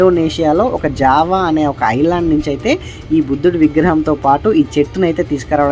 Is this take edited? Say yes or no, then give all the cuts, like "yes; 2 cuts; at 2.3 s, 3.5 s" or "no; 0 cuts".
no; 0 cuts